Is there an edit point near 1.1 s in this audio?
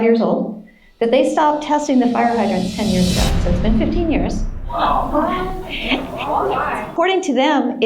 no; 1 cut; at 6.9 s

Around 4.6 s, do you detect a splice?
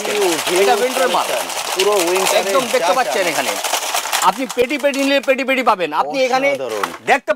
no; 0 cuts

